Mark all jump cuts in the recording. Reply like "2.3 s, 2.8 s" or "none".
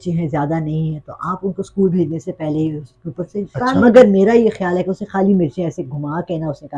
3.8 s

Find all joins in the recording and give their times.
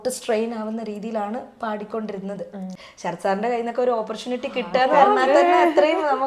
2.8 s

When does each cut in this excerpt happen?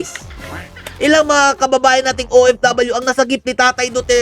1.0 s

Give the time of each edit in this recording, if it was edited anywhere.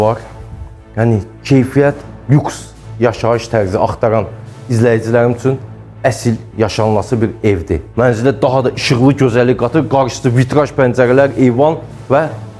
7.9 s

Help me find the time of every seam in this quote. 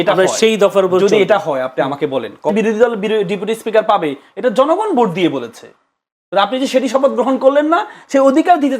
2.5 s

